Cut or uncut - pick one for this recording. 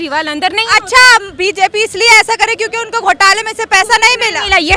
uncut